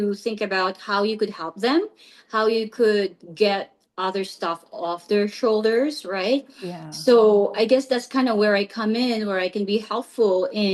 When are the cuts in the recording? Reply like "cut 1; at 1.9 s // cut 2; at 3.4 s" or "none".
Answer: none